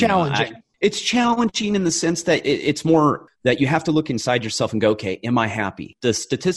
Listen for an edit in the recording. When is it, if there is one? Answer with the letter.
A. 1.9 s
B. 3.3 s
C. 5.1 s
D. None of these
B